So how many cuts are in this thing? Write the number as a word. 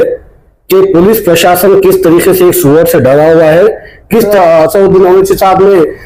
one